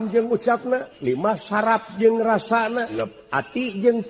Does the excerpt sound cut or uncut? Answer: cut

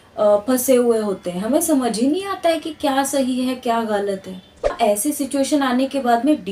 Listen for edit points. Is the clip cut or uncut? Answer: cut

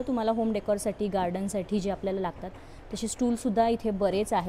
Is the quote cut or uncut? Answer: uncut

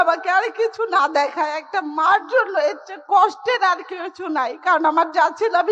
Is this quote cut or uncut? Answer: uncut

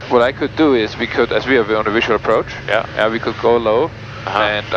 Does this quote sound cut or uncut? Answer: uncut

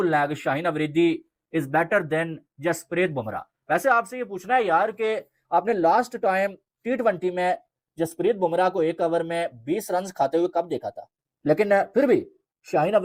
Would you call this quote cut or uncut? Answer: uncut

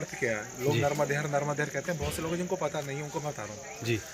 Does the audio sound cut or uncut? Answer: uncut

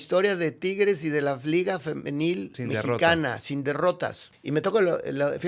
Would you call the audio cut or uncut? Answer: cut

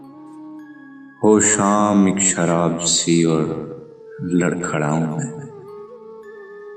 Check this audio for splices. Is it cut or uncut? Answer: cut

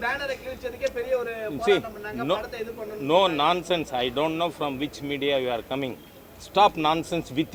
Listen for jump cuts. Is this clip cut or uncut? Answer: uncut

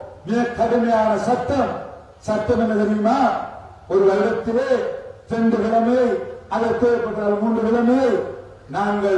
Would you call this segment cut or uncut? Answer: uncut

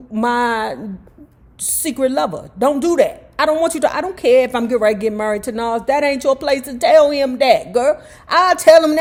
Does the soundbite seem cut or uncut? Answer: uncut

